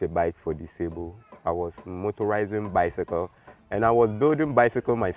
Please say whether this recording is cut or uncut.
uncut